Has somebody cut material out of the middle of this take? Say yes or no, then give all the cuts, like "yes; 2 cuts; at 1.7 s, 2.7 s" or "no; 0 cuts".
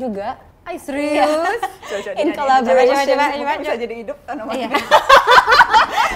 no; 0 cuts